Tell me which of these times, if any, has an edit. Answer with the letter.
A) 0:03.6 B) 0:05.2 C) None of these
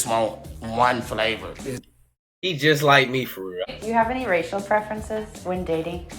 A